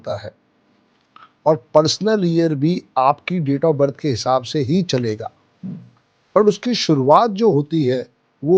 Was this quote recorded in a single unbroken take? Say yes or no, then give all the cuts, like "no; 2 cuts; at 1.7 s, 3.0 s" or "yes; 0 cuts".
yes; 0 cuts